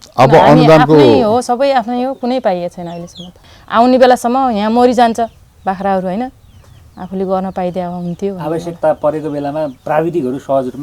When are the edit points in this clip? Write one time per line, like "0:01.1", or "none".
0:03.3
0:09.8

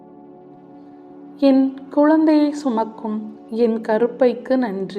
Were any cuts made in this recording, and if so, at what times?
0:01.4

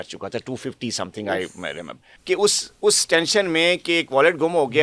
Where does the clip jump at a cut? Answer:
0:02.1

